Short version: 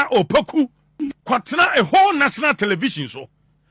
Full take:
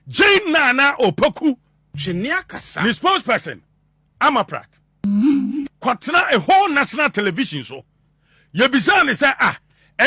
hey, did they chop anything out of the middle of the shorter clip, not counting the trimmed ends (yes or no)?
yes